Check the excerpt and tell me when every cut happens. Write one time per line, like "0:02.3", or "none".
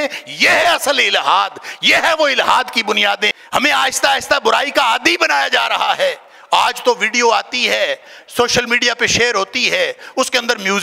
0:03.3